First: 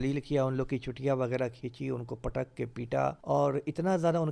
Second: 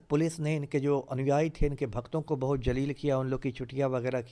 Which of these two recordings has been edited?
first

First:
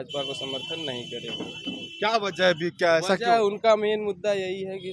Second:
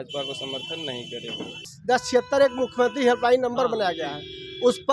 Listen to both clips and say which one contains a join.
second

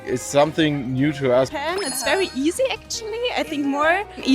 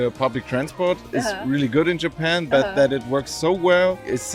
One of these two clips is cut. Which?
first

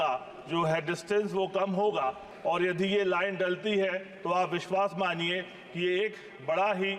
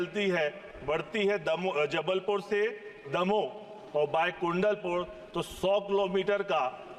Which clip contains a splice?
first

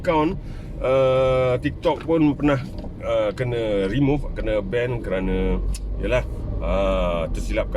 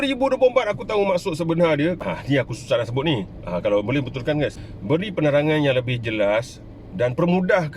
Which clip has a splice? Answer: second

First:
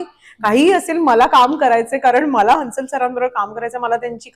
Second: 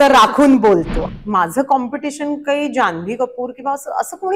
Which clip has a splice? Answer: second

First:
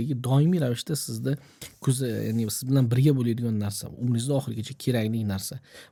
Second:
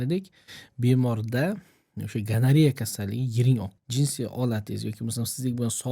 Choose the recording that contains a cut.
second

